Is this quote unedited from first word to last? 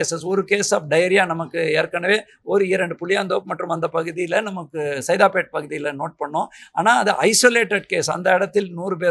yes; 0 cuts

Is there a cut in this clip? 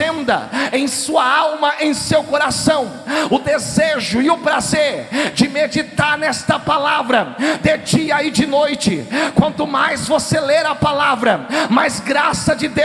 no; 0 cuts

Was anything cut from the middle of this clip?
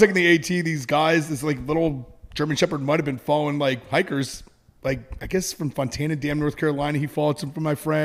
no; 0 cuts

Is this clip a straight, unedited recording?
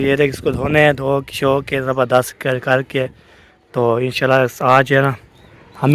yes; 0 cuts

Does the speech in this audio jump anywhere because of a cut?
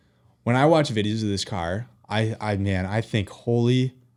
no; 0 cuts

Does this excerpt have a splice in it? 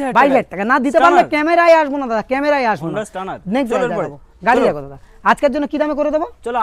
no; 0 cuts

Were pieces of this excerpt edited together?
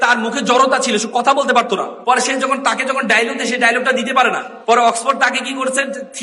yes; 2 cuts; at 1.9 s, 4.5 s

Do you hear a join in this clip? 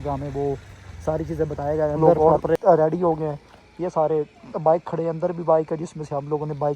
yes; 1 cut; at 2.1 s

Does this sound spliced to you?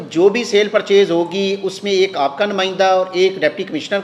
no; 0 cuts

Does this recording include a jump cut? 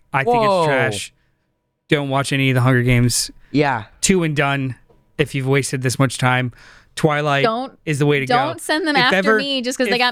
no; 0 cuts

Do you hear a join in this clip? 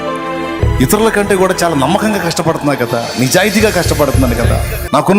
no; 0 cuts

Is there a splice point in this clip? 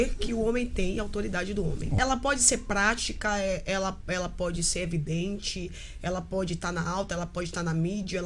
yes; 1 cut; at 1.9 s

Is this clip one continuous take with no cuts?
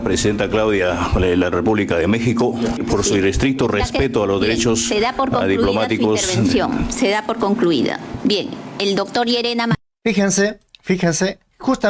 no; 4 cuts; at 2.8 s, 8.1 s, 9.9 s, 10.7 s

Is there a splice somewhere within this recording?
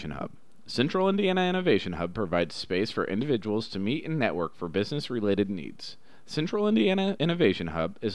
no; 0 cuts

